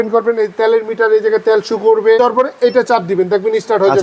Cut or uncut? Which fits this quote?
cut